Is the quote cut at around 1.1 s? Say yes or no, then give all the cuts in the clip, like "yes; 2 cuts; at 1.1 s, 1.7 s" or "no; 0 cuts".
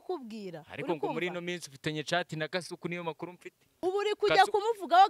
no; 1 cut; at 3.8 s